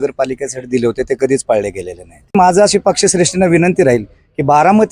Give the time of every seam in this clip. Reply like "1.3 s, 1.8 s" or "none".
2.3 s

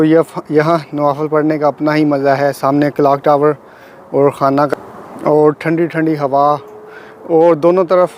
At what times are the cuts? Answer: none

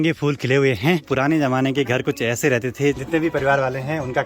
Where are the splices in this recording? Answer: 1.1 s, 3.0 s

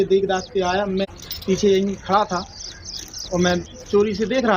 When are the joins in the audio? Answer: 1.1 s

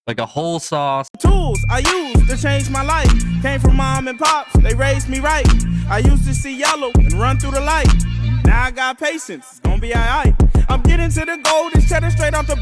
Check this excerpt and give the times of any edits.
1.1 s

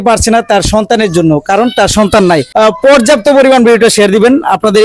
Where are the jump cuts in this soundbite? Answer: 2.5 s

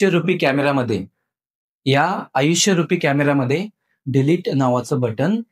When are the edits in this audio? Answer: none

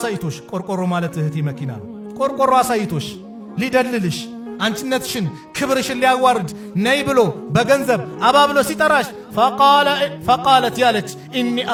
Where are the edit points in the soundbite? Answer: none

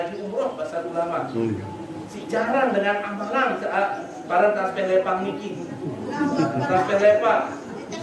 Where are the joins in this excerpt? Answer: none

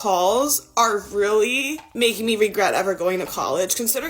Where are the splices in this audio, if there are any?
1.8 s

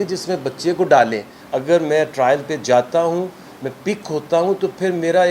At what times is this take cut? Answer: 1.3 s

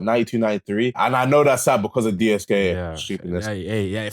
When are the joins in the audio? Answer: 1.0 s

